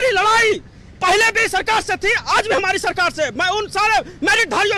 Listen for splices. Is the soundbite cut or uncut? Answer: uncut